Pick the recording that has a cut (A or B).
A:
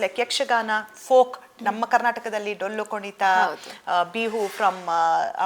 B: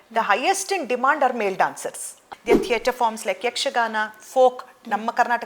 B